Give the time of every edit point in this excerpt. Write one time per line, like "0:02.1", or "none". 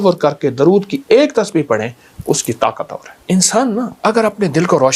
0:03.1
0:03.9